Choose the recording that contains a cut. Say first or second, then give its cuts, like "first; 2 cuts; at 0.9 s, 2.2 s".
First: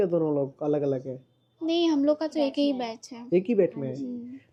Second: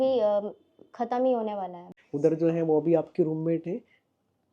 second; 1 cut; at 1.8 s